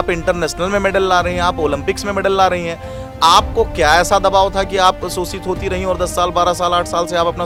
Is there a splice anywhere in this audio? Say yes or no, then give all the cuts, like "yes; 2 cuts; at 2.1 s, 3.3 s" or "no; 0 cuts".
no; 0 cuts